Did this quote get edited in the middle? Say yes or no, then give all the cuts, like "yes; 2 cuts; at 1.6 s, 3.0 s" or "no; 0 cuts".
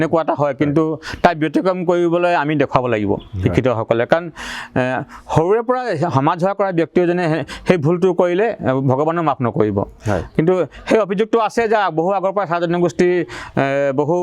no; 0 cuts